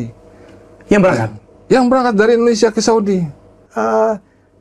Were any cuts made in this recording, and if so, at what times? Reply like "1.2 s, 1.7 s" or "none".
3.6 s